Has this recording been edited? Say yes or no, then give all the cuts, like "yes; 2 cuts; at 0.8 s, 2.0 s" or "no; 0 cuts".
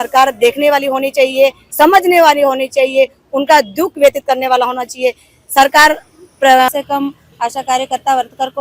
yes; 1 cut; at 6.7 s